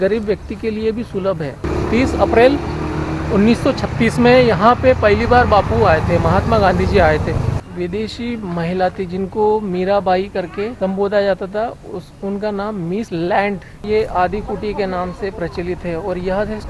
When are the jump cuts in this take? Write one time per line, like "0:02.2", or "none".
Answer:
0:01.6
0:07.6
0:10.7
0:13.1
0:13.8